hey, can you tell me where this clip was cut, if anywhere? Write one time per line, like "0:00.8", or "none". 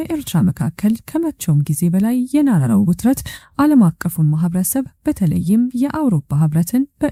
none